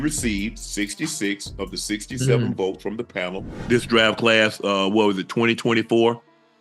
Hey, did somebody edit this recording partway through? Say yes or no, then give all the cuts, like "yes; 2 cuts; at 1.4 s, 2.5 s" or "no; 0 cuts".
yes; 1 cut; at 3.5 s